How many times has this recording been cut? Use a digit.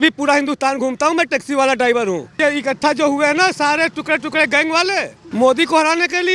2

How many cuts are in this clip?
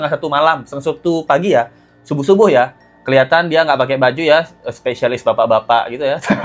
0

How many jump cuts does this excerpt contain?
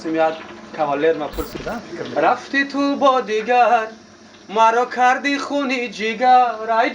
1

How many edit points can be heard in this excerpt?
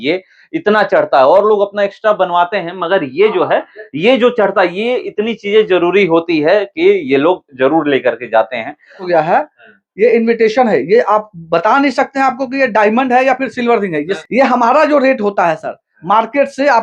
2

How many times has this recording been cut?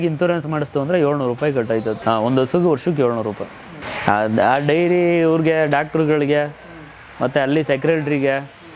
0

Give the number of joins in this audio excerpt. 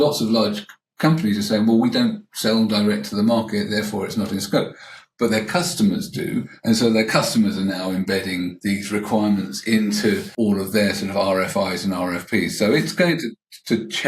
1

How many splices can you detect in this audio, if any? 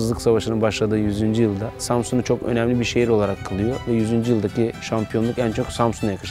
1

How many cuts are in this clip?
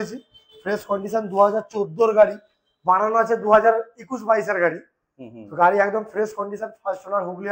0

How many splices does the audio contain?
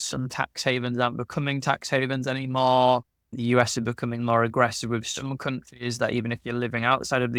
0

